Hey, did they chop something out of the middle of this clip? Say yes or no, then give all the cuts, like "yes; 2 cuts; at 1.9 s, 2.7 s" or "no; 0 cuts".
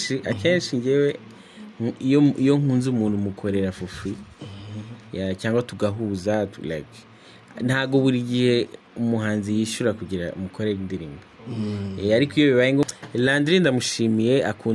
yes; 1 cut; at 12.8 s